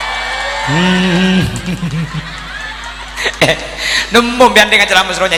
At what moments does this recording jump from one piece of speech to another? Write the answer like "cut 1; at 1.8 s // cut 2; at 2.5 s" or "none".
none